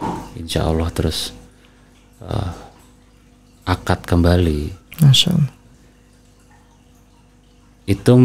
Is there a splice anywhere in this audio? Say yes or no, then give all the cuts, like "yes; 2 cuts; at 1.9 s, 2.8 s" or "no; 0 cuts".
no; 0 cuts